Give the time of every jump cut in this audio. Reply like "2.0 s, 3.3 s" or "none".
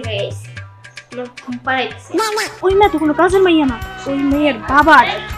2.5 s